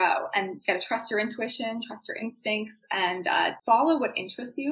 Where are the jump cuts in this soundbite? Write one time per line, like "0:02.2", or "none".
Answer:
none